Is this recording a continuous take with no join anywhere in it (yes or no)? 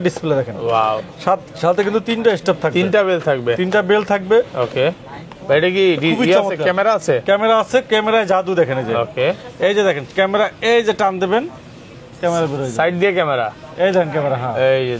yes